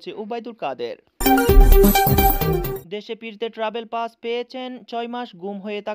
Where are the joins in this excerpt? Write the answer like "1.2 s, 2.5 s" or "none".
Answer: 1.1 s, 2.8 s

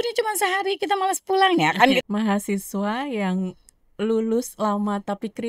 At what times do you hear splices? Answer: 2.0 s

